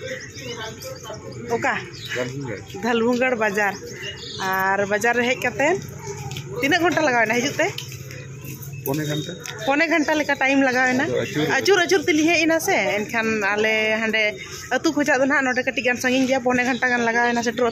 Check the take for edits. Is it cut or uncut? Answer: uncut